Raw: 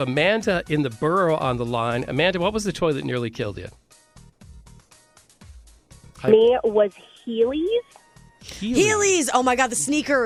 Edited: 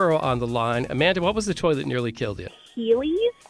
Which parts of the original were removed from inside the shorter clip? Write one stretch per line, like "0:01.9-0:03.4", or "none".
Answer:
0:03.8-0:07.1